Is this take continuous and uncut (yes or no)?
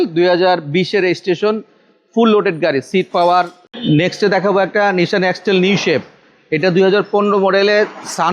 no